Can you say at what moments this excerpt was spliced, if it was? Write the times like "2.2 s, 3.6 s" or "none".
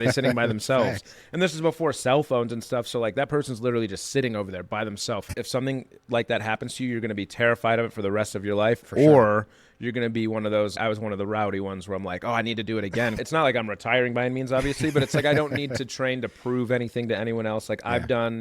5.2 s, 10.7 s, 13.2 s